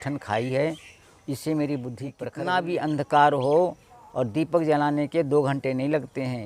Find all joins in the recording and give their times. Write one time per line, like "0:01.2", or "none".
0:02.2